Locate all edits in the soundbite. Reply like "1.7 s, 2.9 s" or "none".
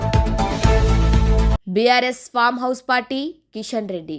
1.5 s